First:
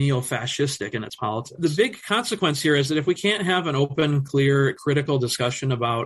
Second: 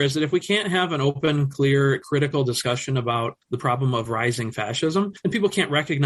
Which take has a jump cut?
first; 1 cut; at 1.5 s

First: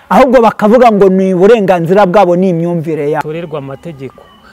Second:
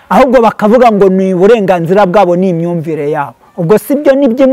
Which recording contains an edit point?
first; 1 cut; at 3.3 s

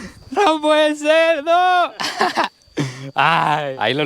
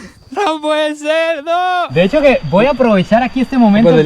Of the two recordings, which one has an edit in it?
second; 1 cut; at 1.9 s

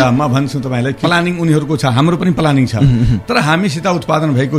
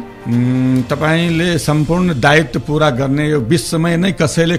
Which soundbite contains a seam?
first; 1 cut; at 1.0 s

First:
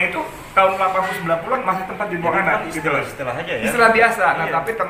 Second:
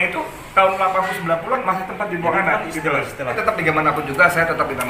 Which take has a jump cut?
second; 1 cut; at 3.4 s

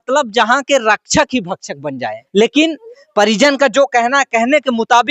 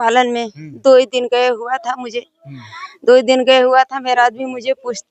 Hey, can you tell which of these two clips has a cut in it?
first; 1 cut; at 2.1 s

